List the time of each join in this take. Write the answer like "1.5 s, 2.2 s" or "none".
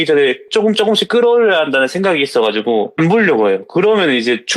2.9 s